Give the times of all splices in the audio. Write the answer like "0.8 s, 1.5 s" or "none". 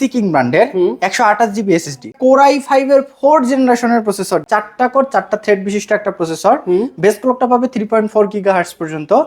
2.1 s, 4.4 s